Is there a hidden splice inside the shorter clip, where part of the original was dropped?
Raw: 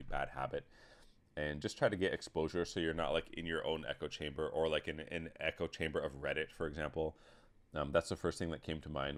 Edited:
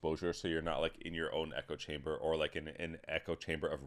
no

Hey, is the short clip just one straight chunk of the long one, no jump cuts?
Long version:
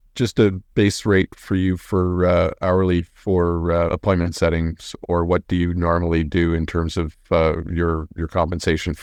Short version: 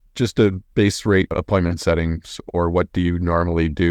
no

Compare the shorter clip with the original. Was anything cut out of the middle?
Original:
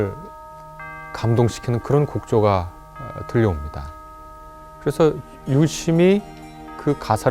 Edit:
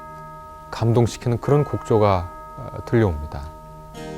no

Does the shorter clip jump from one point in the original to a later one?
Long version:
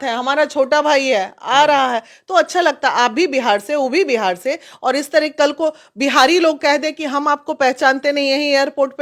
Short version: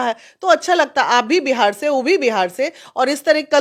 no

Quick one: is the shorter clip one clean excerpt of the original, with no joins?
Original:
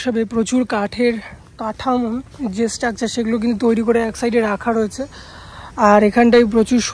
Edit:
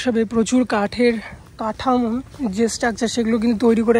yes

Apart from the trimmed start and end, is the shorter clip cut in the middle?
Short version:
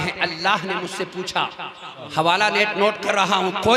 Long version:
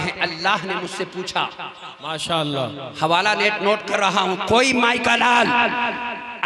yes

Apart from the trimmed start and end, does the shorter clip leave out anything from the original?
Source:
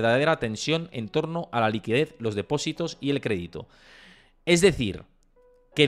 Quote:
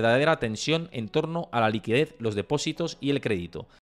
no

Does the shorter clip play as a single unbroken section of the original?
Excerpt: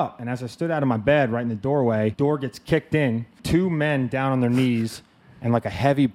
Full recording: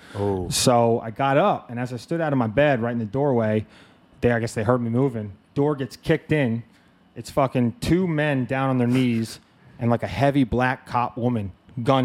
no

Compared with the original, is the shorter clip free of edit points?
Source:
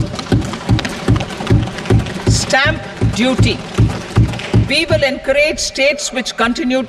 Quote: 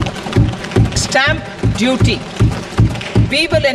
no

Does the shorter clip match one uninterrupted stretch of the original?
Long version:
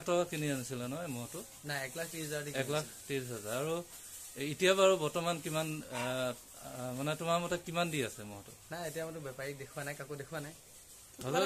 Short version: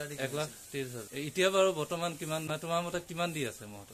no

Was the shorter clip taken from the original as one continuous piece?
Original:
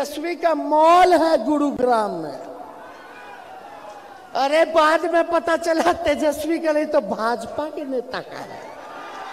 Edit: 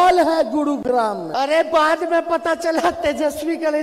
no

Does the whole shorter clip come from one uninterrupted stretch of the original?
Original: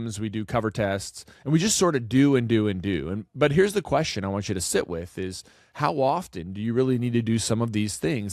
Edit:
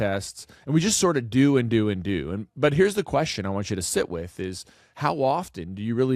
yes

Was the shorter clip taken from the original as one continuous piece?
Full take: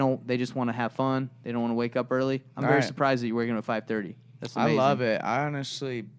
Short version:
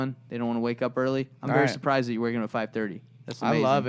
yes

